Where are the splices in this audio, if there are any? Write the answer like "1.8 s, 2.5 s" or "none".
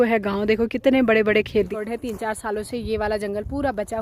1.7 s